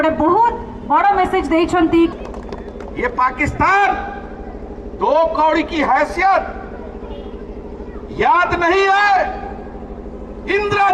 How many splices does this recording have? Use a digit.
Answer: 1